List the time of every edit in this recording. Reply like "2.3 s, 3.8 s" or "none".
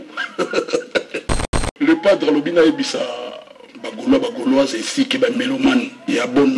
1.6 s